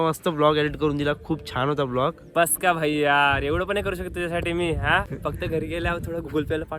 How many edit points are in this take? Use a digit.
1